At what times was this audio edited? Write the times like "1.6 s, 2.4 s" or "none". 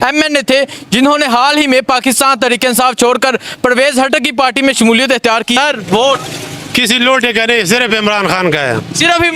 5.6 s

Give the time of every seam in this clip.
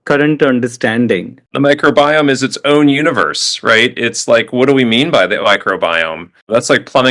1.3 s

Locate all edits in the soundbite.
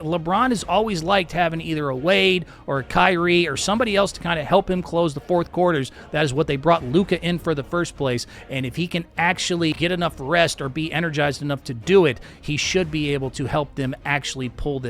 9.8 s

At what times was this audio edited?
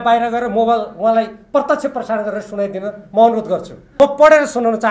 3.8 s

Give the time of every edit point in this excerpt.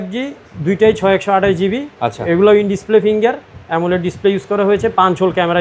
none

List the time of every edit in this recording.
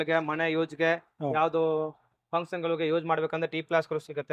none

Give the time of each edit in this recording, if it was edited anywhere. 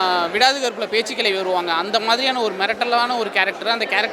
none

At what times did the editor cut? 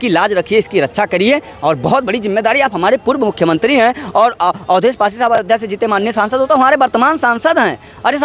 none

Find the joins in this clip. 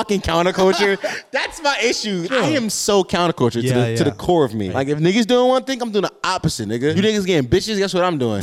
2.3 s, 4.7 s, 6.9 s

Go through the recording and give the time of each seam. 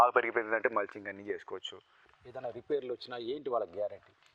2.2 s

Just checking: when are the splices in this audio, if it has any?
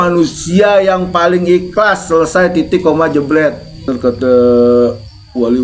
3.9 s

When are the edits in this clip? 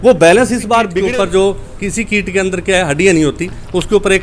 0.9 s

